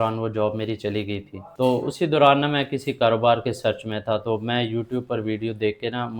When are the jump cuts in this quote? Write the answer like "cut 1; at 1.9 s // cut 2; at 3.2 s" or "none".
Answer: cut 1; at 1.4 s